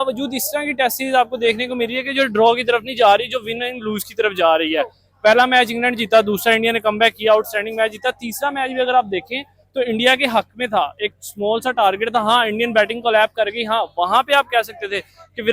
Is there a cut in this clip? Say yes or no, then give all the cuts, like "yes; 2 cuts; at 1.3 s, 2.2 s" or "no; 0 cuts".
no; 0 cuts